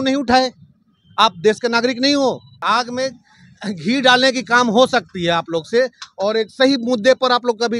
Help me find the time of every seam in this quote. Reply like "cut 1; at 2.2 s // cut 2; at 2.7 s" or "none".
cut 1; at 2.6 s